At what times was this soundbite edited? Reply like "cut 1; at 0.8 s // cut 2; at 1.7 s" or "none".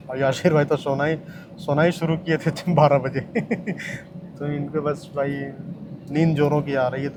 none